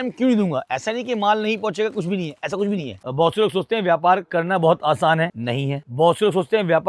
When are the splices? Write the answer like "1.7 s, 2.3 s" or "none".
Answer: 3.0 s